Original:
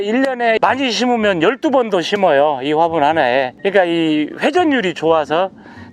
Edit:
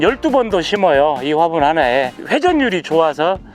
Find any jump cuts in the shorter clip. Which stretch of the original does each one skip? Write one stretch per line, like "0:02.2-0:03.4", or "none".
0:03.6-0:04.3